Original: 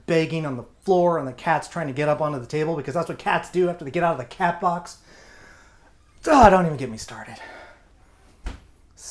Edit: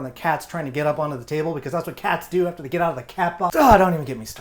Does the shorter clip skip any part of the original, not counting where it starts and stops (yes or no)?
yes